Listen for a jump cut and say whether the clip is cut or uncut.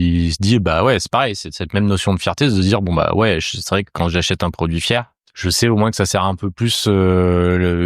cut